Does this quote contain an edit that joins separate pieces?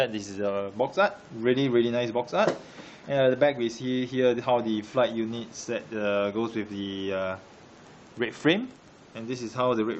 no; 0 cuts

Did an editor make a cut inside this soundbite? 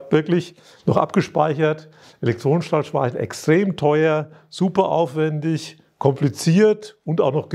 no; 0 cuts

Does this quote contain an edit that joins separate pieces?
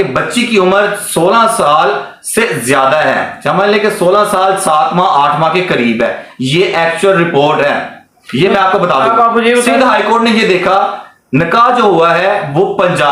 no; 0 cuts

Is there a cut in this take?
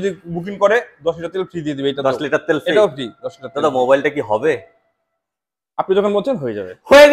no; 0 cuts

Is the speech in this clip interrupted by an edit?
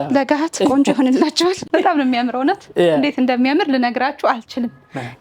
yes; 1 cut; at 1.6 s

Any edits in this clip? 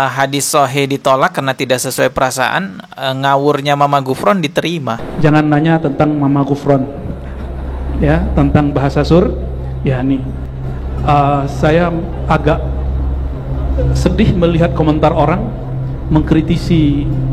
no; 0 cuts

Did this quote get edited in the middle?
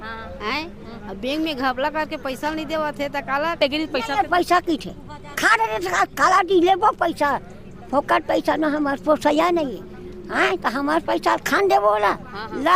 yes; 1 cut; at 3.6 s

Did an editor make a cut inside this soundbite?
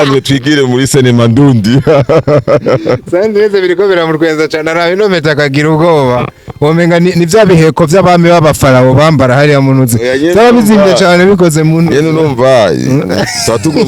no; 0 cuts

